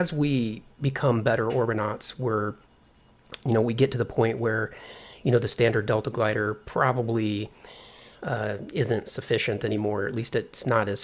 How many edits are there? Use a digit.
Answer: 1